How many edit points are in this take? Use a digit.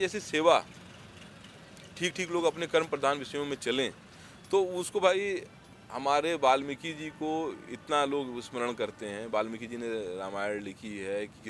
0